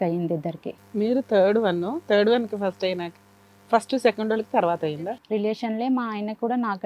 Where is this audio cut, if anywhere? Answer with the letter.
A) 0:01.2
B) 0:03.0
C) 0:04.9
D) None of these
C